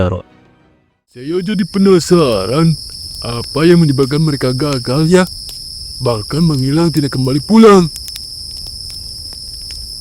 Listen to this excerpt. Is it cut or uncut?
cut